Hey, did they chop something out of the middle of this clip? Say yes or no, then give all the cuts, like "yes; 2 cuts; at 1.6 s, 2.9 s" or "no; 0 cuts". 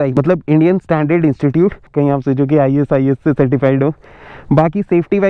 no; 0 cuts